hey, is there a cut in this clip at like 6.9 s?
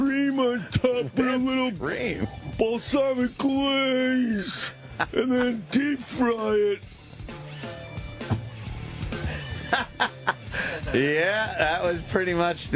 no; 1 cut; at 2.7 s

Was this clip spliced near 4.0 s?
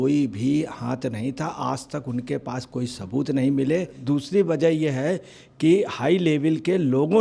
yes; 1 cut; at 4.0 s

